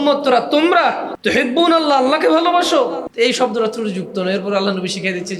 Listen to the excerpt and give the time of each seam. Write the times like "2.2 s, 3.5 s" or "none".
1.1 s, 3.1 s